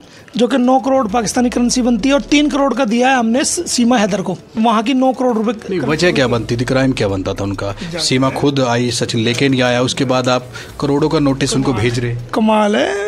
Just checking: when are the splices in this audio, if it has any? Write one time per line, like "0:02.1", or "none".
0:04.6